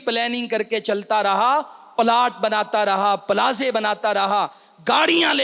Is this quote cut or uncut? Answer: uncut